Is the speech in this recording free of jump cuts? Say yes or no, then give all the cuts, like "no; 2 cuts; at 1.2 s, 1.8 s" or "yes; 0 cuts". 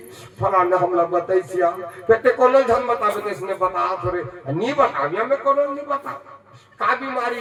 yes; 0 cuts